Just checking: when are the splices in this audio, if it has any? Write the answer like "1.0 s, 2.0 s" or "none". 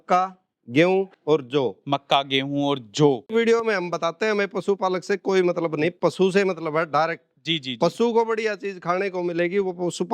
3.3 s